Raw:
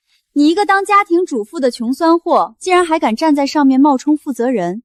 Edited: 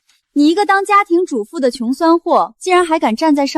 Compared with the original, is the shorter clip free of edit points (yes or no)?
yes